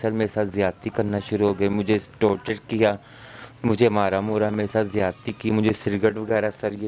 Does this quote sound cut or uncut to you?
uncut